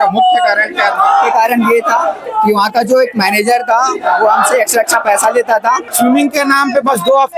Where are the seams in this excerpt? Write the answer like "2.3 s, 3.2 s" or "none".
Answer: 5.9 s